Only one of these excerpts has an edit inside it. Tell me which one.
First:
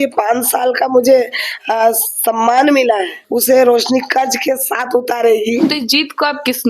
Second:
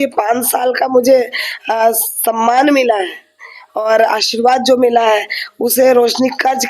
first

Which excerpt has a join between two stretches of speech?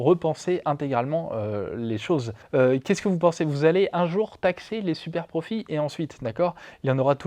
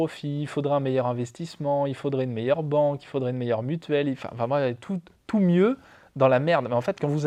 first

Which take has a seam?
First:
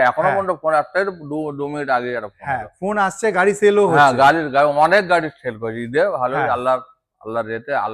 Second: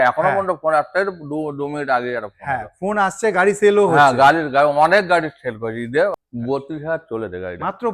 second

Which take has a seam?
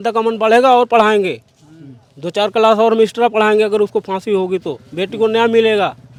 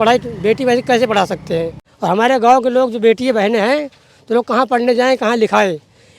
second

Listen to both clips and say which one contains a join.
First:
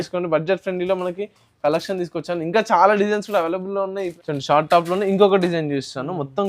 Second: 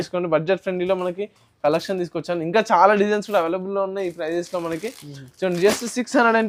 first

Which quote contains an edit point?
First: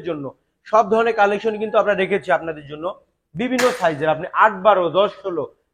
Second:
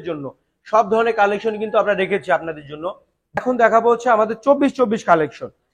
second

